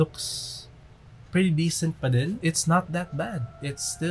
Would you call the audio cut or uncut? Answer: cut